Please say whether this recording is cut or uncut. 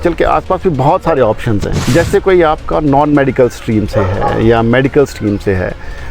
cut